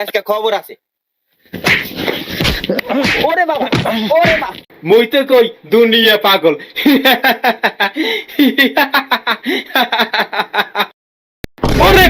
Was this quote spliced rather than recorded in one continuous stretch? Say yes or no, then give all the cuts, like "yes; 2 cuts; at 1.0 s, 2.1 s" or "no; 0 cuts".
yes; 1 cut; at 4.6 s